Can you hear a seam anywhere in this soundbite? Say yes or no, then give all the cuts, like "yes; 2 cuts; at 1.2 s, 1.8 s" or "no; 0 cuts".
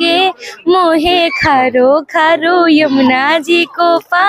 no; 0 cuts